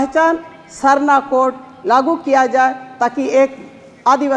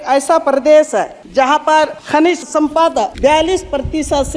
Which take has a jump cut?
second; 3 cuts; at 1.2 s, 2.0 s, 3.1 s

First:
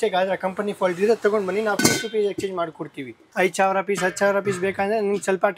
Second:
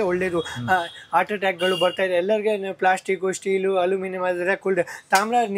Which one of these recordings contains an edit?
first; 1 cut; at 3.2 s

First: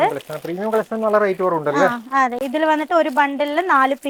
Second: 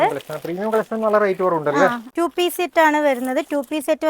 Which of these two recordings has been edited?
second; 1 cut; at 2.1 s

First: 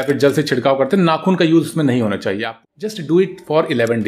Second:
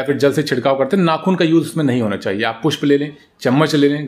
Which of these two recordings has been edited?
first; 1 cut; at 2.5 s

